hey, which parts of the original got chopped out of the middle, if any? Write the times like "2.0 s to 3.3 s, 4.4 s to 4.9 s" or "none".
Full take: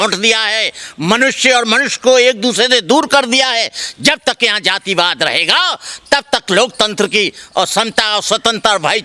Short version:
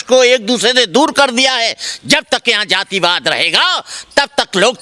none